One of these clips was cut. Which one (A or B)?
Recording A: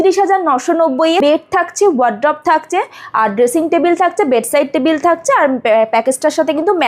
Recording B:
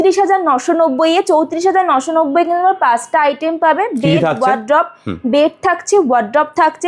A